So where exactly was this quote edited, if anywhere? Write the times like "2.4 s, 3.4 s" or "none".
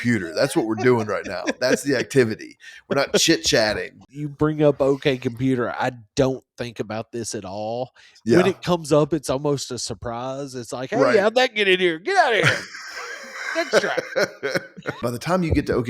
4.0 s, 15.0 s